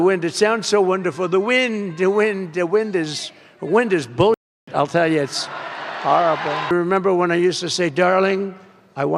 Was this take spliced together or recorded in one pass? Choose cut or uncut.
cut